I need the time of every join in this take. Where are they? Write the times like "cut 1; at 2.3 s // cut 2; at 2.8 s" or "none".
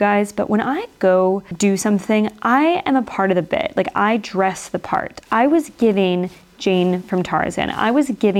cut 1; at 1.5 s